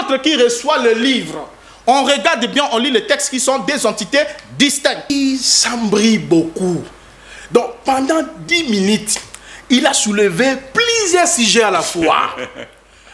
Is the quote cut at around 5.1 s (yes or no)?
yes